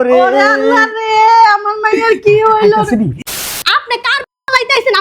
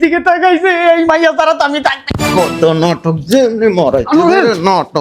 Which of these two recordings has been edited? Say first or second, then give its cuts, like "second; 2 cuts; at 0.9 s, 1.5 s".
first; 1 cut; at 3.3 s